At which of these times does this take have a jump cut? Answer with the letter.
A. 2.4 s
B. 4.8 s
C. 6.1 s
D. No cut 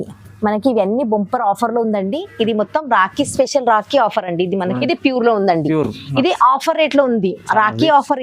B